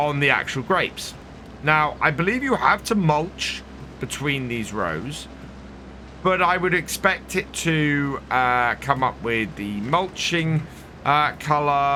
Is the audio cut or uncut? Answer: uncut